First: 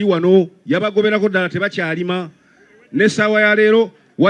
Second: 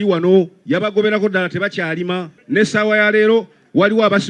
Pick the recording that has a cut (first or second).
second